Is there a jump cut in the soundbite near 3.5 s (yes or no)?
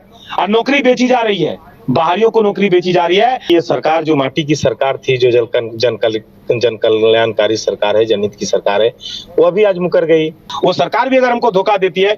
yes